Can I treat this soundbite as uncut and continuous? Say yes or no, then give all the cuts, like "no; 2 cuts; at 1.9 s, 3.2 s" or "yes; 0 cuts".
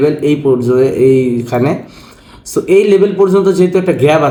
yes; 0 cuts